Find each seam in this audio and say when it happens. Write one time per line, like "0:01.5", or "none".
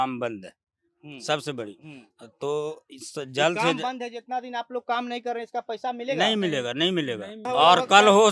0:07.3